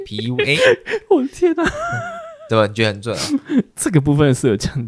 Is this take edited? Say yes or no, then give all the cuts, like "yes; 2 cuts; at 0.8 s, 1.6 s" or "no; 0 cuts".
no; 0 cuts